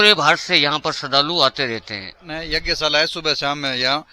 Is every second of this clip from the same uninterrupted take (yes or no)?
no